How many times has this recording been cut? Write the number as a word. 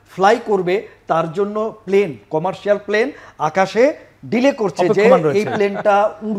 zero